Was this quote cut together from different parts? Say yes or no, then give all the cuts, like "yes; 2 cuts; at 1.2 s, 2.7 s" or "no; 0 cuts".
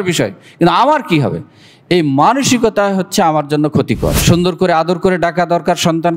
yes; 1 cut; at 4.2 s